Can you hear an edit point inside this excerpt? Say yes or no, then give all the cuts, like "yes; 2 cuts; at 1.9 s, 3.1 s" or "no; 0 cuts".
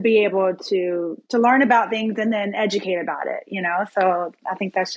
no; 0 cuts